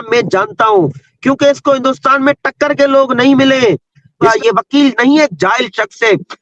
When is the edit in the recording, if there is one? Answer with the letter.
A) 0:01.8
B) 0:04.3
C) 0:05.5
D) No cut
B